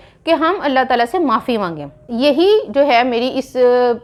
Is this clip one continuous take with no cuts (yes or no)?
yes